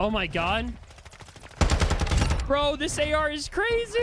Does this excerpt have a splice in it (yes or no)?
no